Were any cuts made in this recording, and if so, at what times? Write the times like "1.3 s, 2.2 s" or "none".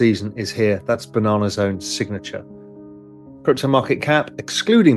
none

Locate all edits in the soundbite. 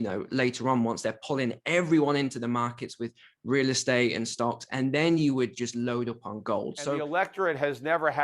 6.9 s

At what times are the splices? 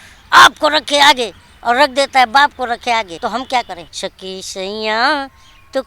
3.1 s, 3.8 s

